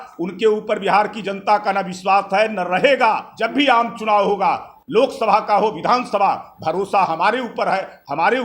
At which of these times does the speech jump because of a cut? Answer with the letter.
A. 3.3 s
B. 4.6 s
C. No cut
A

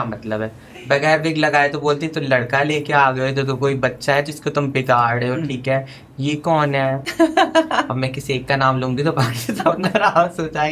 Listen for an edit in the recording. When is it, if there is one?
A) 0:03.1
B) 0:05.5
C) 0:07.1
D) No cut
C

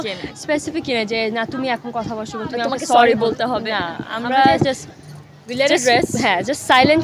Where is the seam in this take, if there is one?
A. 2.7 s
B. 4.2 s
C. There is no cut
C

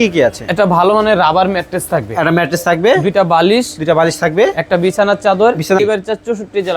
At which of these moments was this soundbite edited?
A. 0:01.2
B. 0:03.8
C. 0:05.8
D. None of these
C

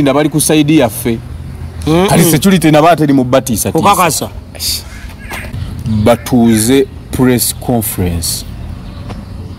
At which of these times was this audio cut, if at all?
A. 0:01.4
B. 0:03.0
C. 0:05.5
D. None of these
C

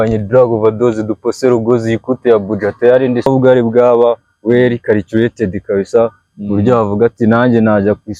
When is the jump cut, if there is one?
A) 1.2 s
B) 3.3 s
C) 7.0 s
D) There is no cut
B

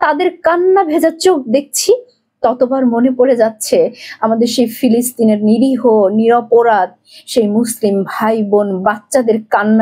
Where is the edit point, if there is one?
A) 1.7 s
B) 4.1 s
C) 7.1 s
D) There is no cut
D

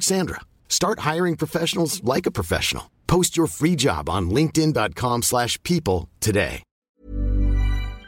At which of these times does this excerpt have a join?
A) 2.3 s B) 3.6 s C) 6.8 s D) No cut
C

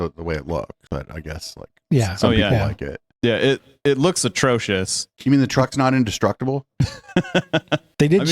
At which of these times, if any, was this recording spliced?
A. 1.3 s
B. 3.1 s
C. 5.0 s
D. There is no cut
C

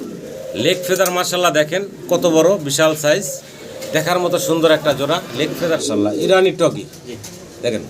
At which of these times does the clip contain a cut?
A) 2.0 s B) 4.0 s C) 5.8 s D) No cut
C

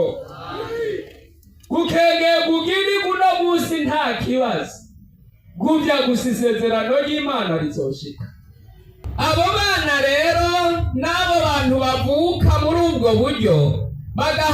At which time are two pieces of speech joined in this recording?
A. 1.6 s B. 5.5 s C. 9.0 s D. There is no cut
C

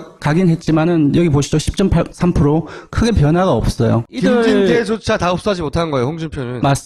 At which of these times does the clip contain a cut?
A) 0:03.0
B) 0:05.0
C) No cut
B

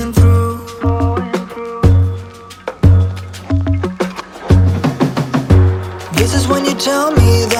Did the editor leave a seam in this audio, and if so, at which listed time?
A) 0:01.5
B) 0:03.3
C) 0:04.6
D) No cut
D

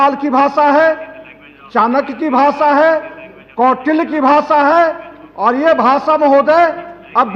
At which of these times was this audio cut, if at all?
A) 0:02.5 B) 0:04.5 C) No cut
C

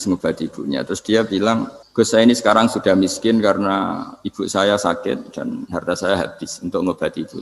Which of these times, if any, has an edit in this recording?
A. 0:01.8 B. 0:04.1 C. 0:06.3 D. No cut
A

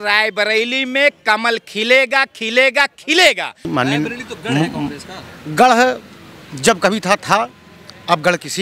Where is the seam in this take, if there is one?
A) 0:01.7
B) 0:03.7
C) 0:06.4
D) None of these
B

